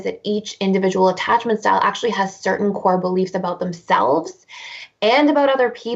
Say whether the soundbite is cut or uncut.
uncut